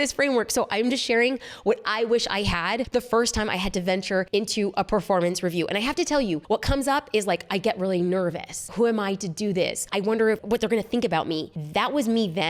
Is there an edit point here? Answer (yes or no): yes